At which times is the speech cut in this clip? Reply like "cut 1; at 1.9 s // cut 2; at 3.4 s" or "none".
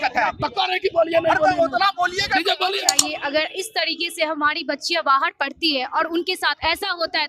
cut 1; at 3.0 s